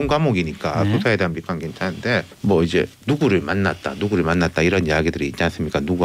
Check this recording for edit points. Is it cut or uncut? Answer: cut